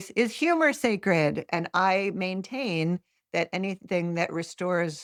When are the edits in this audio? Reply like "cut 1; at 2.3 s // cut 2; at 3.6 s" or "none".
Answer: none